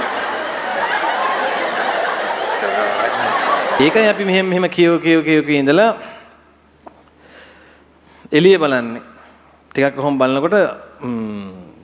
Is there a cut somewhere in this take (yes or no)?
yes